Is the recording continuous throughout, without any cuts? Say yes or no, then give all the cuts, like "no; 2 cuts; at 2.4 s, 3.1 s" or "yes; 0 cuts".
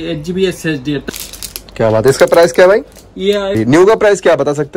no; 2 cuts; at 1.0 s, 3.5 s